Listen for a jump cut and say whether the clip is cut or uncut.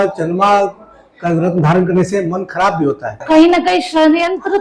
cut